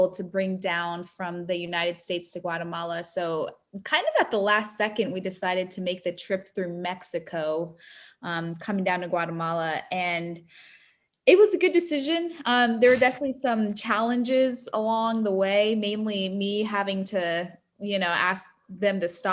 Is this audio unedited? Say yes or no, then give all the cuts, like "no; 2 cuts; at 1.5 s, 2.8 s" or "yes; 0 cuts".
yes; 0 cuts